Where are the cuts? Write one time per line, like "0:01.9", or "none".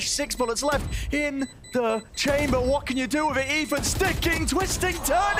none